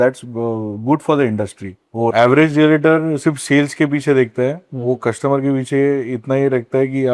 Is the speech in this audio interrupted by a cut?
yes; 1 cut; at 2.1 s

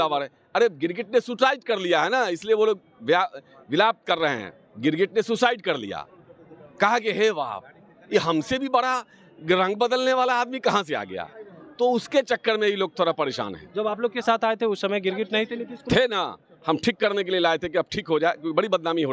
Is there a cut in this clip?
no; 0 cuts

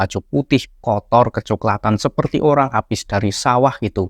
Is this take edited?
no; 0 cuts

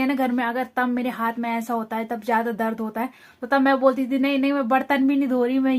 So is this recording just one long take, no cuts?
yes; 0 cuts

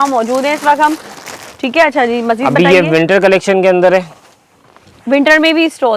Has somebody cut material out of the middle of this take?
no; 0 cuts

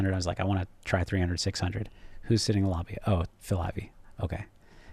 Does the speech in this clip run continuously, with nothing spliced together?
yes; 0 cuts

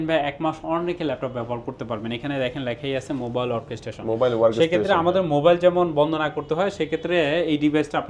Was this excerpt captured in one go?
yes; 0 cuts

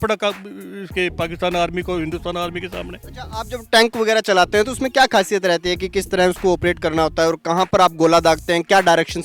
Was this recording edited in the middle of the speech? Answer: no; 0 cuts

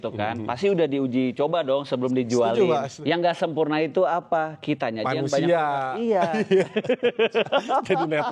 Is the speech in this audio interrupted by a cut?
yes; 1 cut; at 2.9 s

